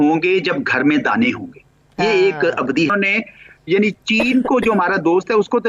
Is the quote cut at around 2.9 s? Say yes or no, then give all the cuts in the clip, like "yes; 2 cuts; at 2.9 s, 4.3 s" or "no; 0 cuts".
yes; 1 cut; at 2.9 s